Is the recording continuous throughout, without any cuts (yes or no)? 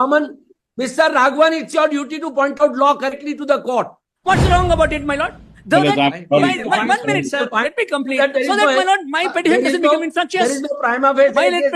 no